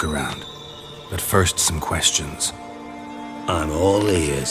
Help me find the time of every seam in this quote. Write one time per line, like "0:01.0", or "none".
none